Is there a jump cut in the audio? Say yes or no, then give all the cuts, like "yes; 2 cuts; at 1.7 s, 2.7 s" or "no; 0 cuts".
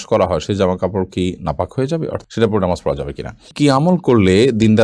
yes; 2 cuts; at 2.3 s, 3.5 s